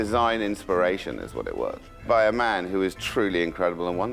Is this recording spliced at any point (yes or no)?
yes